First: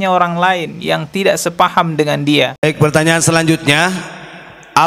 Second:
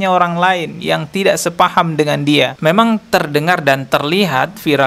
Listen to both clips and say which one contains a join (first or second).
first